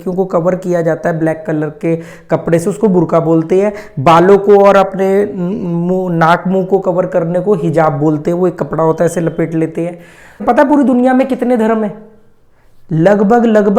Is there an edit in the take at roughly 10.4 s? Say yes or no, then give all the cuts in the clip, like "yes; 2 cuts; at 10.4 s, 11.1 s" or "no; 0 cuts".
yes; 1 cut; at 10.4 s